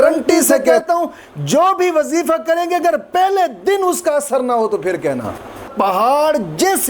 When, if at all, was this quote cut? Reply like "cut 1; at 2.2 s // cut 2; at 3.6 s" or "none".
cut 1; at 0.7 s // cut 2; at 5.7 s